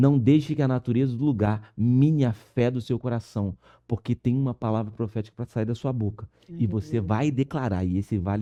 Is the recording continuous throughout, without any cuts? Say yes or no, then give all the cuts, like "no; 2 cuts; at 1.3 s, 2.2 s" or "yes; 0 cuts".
yes; 0 cuts